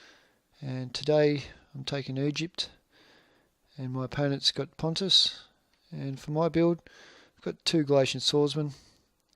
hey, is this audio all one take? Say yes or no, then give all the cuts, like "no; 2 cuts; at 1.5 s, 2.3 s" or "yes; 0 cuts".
no; 1 cut; at 3.9 s